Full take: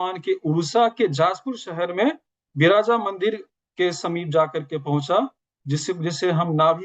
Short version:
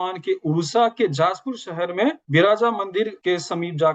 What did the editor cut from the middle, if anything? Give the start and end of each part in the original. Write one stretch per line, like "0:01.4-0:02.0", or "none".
0:02.2-0:02.5
0:03.4-0:03.7

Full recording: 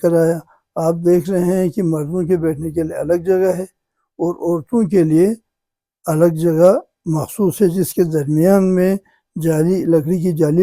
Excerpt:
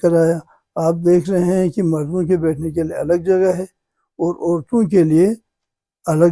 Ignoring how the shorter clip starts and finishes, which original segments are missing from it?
none

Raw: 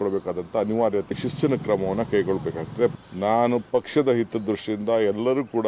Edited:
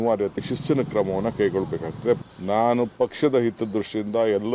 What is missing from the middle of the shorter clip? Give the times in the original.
none

